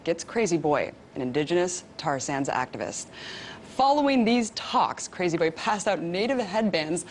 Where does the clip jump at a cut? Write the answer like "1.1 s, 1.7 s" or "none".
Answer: none

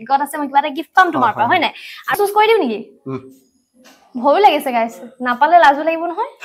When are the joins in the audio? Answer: 2.1 s

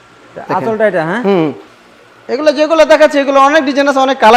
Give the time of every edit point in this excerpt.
1.6 s

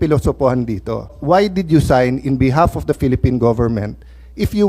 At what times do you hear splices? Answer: 1.2 s

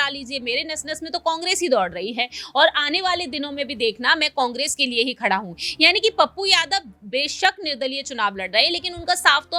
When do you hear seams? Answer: none

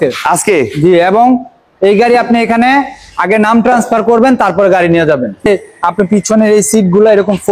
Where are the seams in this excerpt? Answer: 5.4 s

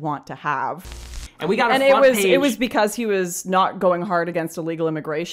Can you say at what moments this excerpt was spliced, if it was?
1.2 s

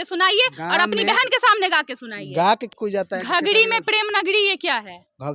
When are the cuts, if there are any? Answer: 2.7 s

